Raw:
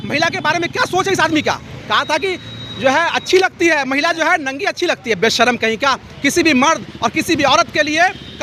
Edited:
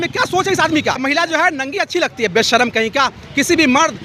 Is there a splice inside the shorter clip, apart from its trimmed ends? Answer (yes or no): yes